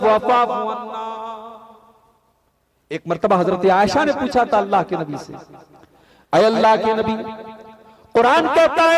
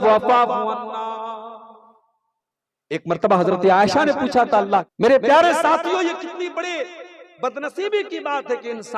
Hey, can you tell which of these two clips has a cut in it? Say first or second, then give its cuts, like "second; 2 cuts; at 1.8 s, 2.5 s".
second; 1 cut; at 4.9 s